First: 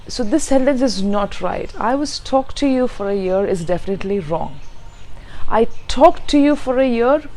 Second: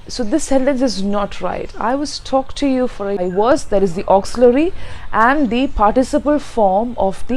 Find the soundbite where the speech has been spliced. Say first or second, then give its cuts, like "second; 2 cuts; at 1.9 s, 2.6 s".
second; 1 cut; at 3.2 s